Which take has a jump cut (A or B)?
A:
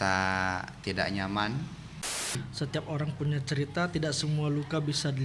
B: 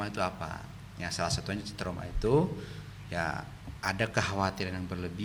A